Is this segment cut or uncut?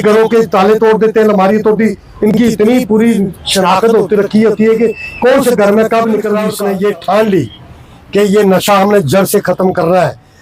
cut